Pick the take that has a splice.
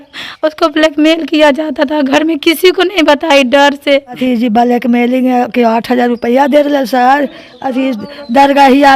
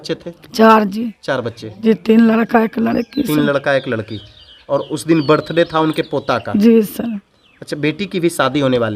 first; 1 cut; at 4.2 s

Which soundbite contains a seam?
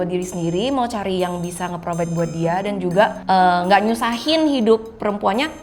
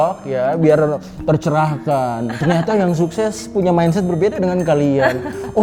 first; 1 cut; at 3.2 s

